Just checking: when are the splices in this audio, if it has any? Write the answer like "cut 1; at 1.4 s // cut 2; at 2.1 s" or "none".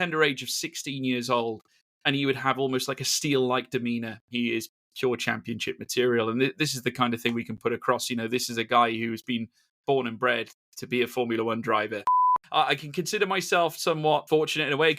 cut 1; at 4.3 s // cut 2; at 12.2 s // cut 3; at 14.2 s